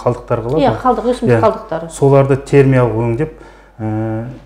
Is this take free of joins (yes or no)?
yes